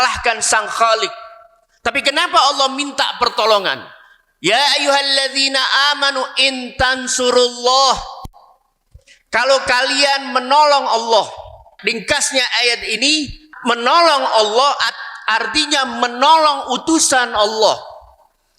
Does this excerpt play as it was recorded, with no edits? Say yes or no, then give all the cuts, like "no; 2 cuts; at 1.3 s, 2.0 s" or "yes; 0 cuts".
no; 2 cuts; at 11.7 s, 13.5 s